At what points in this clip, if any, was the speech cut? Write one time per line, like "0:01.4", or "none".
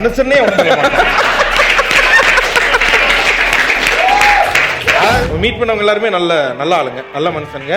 0:05.2